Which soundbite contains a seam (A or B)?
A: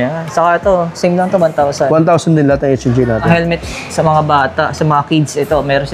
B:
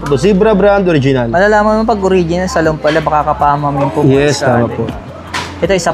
A